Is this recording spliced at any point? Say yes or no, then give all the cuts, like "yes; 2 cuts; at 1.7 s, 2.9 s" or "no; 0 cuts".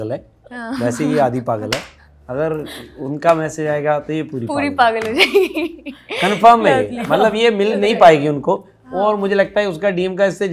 no; 0 cuts